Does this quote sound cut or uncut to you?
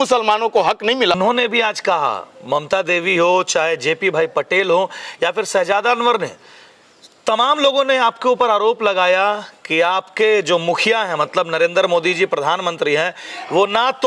cut